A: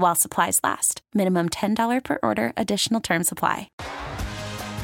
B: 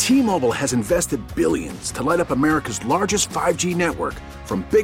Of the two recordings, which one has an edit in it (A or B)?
A